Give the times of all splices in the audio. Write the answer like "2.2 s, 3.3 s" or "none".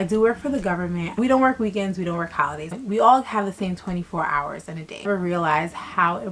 2.7 s, 5.1 s